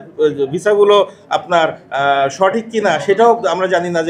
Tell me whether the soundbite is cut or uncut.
uncut